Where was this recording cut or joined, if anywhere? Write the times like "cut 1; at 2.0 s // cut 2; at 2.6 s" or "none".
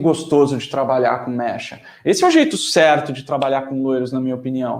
none